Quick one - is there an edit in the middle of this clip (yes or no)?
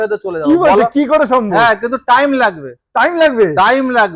no